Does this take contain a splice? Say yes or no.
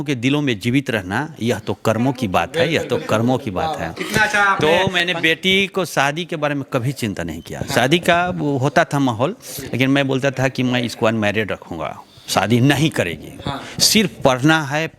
no